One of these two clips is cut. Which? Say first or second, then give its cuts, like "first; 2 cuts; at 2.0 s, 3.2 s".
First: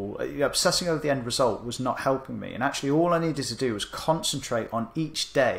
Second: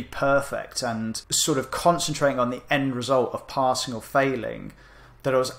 second; 1 cut; at 1.3 s